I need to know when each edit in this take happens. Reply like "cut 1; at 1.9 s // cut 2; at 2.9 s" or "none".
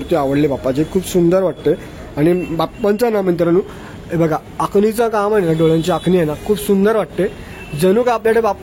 none